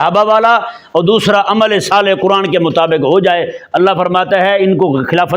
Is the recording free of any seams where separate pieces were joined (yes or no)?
yes